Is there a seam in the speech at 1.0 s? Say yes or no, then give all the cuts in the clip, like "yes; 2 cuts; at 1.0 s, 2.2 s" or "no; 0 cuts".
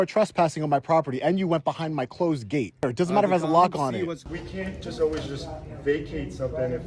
no; 2 cuts; at 2.8 s, 4.2 s